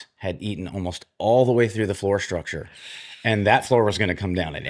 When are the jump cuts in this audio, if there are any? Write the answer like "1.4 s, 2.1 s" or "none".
none